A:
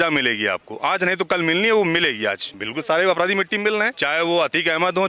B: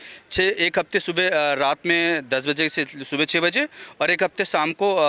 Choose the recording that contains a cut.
A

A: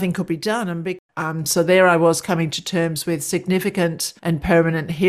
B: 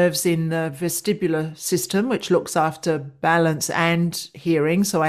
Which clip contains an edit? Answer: A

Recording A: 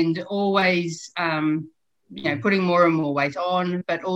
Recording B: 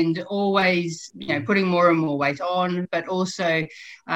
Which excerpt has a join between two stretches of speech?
B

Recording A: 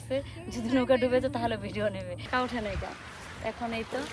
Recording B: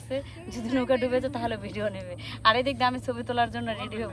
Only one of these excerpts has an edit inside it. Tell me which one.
A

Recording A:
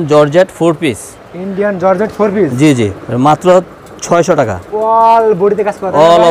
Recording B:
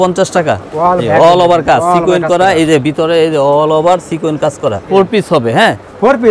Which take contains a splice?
B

